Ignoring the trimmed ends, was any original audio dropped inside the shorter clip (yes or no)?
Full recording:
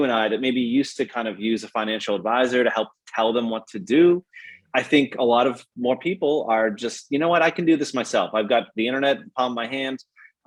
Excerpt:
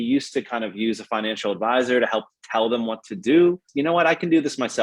yes